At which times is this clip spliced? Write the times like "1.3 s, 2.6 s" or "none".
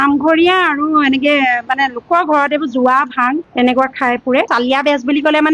4.5 s